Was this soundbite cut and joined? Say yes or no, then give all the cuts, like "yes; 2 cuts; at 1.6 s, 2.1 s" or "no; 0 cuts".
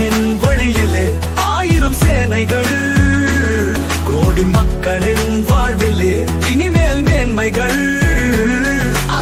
no; 0 cuts